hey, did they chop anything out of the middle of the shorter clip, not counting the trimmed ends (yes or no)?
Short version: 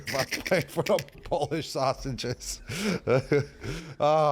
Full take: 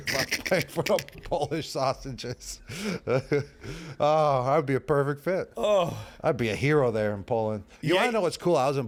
no